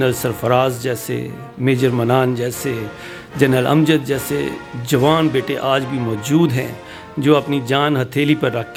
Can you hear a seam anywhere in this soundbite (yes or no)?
no